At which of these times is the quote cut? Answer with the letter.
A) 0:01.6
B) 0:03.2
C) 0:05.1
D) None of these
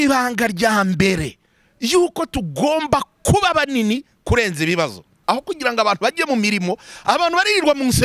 C